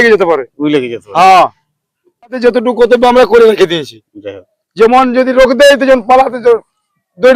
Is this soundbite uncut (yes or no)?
no